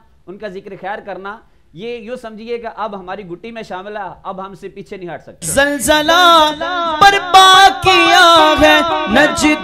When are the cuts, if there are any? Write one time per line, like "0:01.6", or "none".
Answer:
0:05.4